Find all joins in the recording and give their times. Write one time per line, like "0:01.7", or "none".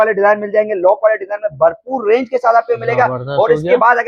none